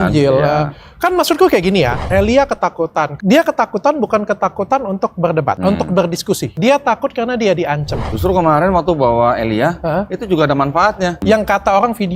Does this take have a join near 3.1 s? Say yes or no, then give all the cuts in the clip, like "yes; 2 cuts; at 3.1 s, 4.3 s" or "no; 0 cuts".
yes; 6 cuts; at 2.0 s, 3.1 s, 5.6 s, 6.5 s, 8.0 s, 11.2 s